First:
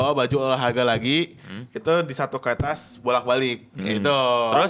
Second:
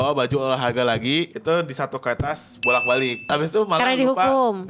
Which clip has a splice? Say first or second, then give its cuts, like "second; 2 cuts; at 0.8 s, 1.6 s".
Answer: second; 2 cuts; at 1.3 s, 3.3 s